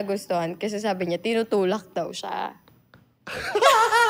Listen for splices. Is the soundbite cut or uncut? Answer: uncut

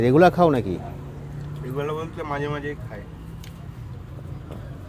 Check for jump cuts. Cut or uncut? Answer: uncut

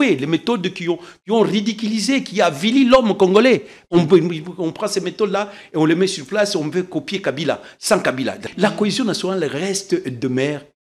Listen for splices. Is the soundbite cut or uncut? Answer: cut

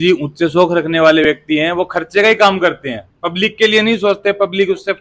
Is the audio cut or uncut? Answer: uncut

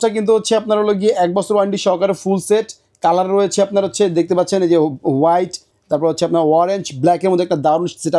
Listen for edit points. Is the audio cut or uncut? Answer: uncut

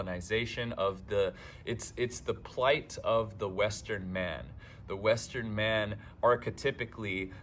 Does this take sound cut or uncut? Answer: uncut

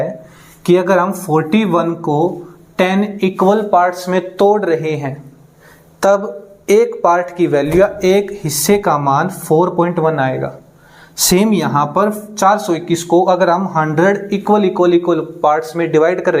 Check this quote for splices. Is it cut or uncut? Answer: uncut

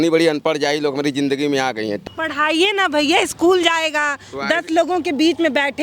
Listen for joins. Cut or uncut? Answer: cut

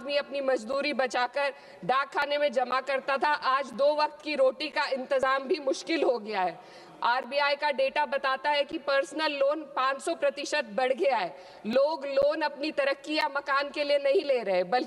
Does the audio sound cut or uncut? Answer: uncut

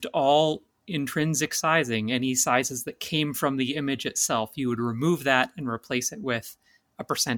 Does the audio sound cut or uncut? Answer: uncut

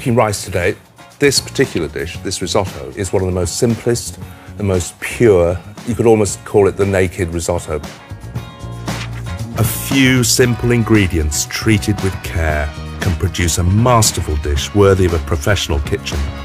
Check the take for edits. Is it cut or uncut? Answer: cut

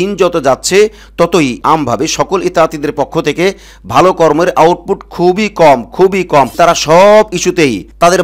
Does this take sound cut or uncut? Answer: cut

